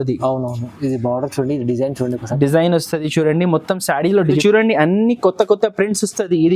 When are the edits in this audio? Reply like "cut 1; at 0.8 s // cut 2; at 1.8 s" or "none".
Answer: cut 1; at 4.4 s